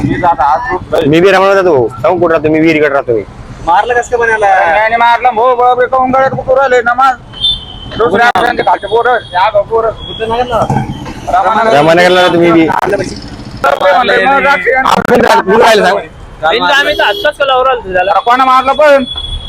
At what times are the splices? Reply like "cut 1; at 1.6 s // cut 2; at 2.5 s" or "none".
cut 1; at 13.6 s